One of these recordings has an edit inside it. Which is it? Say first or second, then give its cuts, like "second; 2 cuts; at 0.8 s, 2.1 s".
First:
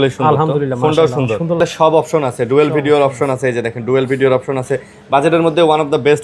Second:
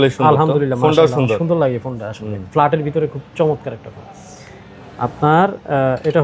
first; 1 cut; at 1.6 s